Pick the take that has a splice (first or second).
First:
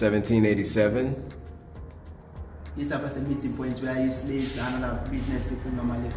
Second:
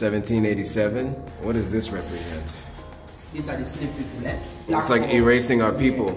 second